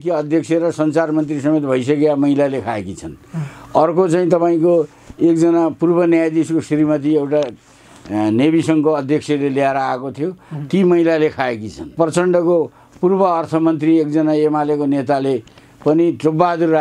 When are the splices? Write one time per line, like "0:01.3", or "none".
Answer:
0:11.9